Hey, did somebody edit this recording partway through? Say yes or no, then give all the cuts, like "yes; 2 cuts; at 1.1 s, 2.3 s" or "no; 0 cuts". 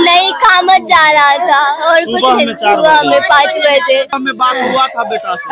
yes; 1 cut; at 4.2 s